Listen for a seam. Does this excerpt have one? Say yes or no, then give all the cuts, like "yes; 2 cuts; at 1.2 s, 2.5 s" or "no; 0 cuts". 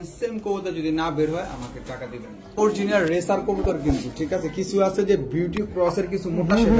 yes; 1 cut; at 2.6 s